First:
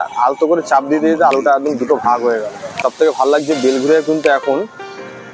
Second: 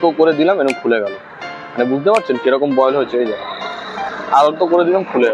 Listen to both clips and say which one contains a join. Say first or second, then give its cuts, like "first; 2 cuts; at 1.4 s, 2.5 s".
first; 1 cut; at 2.6 s